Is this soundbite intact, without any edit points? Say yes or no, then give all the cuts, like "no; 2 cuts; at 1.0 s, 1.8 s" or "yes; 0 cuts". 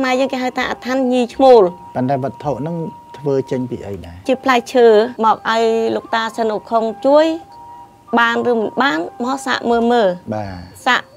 no; 2 cuts; at 4.2 s, 5.1 s